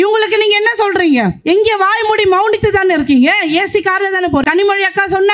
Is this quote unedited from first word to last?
no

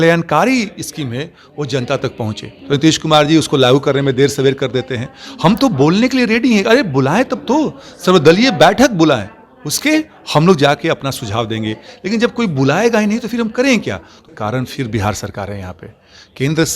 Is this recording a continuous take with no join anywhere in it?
no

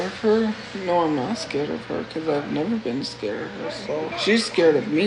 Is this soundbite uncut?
no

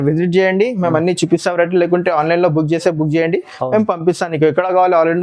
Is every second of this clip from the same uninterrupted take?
yes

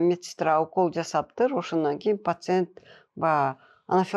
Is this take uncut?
yes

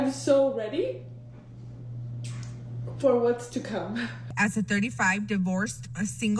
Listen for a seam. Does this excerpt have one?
yes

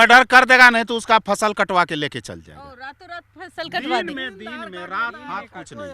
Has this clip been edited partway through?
no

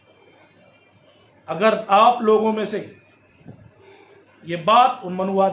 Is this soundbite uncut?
yes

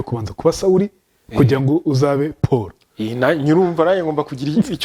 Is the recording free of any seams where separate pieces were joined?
yes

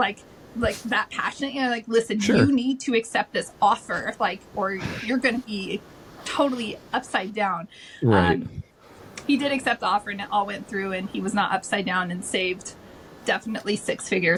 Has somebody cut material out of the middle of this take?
no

